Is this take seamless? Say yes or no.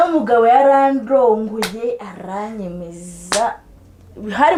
yes